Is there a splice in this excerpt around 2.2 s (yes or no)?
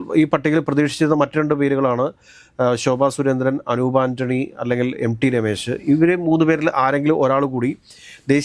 no